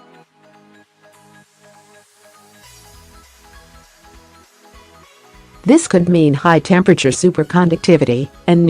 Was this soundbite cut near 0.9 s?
no; 1 cut; at 5.6 s

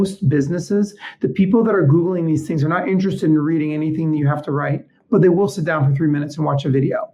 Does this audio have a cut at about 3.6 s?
no; 0 cuts

